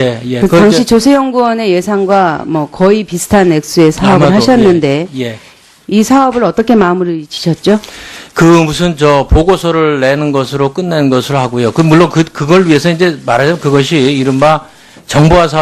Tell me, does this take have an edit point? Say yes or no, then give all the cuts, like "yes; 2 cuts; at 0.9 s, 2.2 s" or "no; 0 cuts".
yes; 1 cut; at 4.2 s